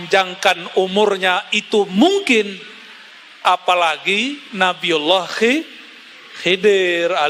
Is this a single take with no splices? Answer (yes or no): yes